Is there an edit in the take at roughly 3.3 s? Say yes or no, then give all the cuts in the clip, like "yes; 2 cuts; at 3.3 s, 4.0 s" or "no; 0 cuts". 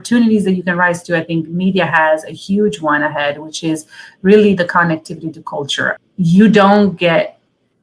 no; 1 cut; at 5.9 s